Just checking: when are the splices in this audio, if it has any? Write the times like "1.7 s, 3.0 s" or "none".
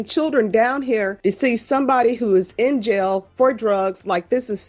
1.1 s